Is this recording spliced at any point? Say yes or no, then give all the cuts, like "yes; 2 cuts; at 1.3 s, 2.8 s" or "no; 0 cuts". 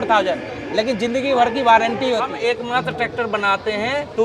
yes; 1 cut; at 2.3 s